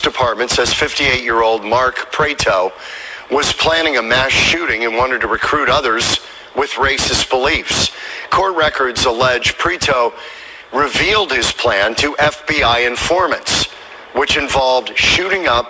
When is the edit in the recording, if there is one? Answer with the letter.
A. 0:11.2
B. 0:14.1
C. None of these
B